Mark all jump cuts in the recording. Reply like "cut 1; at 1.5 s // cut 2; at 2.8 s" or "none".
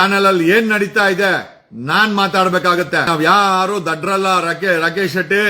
cut 1; at 3.1 s